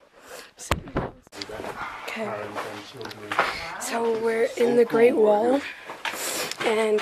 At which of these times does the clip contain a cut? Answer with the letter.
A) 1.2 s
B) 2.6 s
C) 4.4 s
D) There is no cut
A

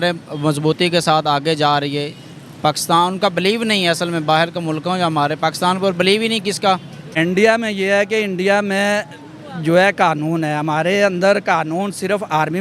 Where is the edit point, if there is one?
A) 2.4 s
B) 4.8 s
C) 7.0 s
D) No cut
C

